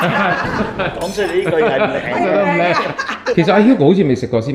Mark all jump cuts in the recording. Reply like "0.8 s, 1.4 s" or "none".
3.3 s